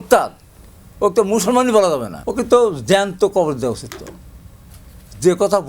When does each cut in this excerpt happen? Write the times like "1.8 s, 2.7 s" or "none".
2.2 s

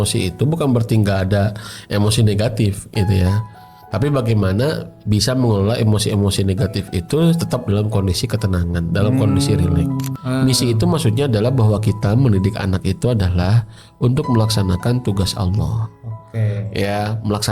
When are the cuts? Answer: 10.1 s

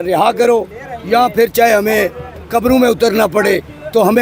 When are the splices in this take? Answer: none

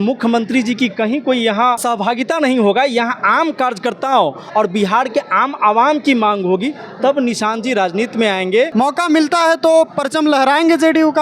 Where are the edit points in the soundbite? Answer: 1.8 s, 8.7 s

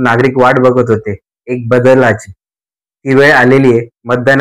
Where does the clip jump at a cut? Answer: none

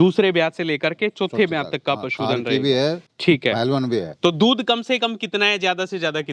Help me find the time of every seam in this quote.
none

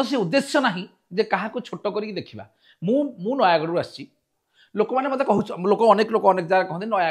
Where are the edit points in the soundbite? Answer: none

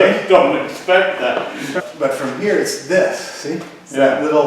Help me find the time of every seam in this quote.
1.8 s

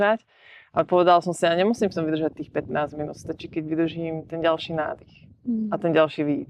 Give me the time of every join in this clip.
none

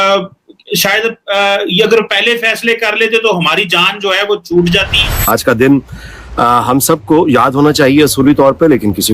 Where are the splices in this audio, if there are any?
5.2 s

